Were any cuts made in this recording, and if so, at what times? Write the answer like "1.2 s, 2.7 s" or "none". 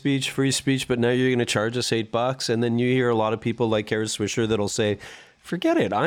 none

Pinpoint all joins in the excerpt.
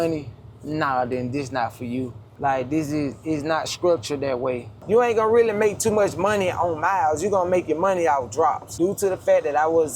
2.2 s, 4.7 s, 8.7 s

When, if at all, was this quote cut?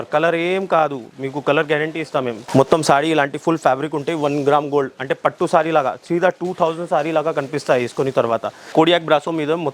2.4 s, 8.6 s

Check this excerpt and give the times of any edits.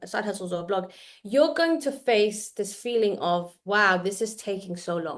none

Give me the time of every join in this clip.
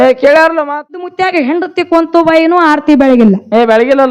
0.9 s

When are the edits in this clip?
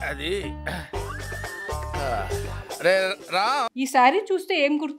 3.7 s

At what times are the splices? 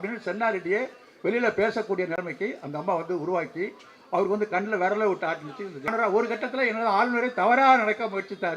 5.9 s

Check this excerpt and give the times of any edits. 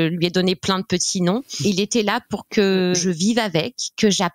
1.5 s, 3.0 s

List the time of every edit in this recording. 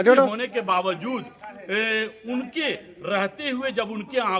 none

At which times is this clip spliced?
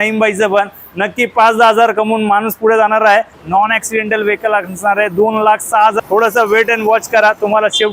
3.4 s, 6.0 s

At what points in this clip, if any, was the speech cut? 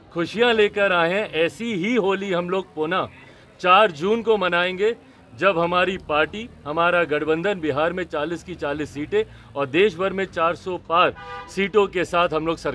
none

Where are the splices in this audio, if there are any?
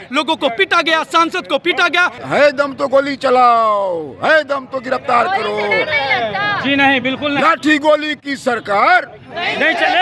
2.2 s

